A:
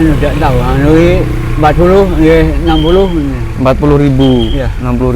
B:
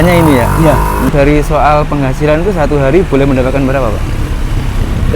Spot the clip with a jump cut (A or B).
B